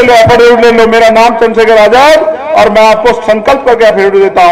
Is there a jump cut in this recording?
no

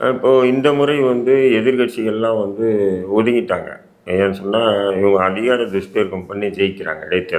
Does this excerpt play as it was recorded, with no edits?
yes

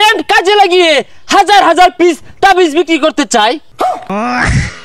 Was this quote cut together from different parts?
yes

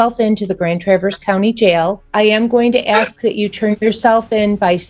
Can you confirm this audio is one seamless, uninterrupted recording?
no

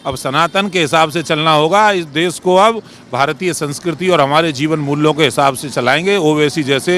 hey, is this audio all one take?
yes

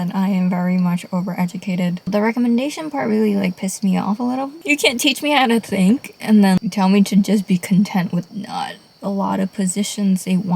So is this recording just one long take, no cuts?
no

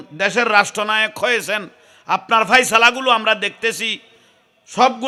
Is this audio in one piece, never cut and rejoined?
yes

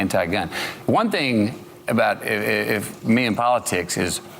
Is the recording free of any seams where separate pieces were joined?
yes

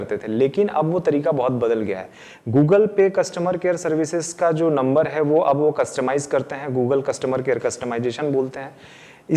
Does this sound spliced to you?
no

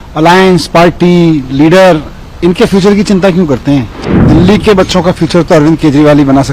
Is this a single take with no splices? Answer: no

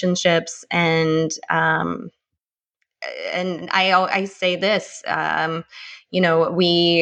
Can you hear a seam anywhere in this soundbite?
no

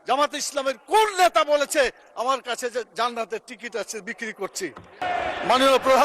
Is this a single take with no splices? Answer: no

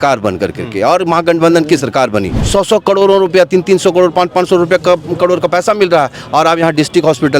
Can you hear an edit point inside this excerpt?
yes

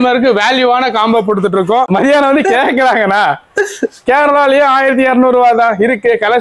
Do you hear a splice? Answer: yes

